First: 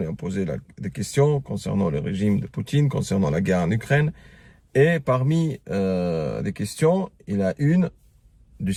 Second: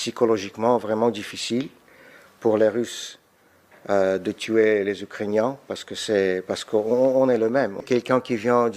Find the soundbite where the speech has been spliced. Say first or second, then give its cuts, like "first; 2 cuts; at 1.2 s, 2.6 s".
second; 1 cut; at 7.9 s